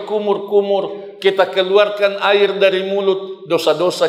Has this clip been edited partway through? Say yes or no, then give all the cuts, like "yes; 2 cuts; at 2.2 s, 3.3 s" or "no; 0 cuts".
no; 0 cuts